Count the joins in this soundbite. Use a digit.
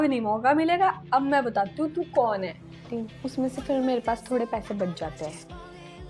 1